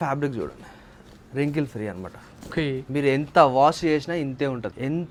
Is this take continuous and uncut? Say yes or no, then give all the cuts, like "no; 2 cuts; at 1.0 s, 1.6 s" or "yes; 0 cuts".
yes; 0 cuts